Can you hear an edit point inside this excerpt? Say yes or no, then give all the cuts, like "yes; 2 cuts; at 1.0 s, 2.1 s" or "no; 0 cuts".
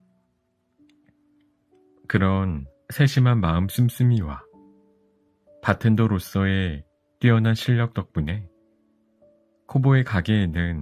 no; 0 cuts